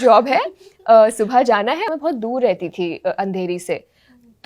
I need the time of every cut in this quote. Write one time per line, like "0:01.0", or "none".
0:01.9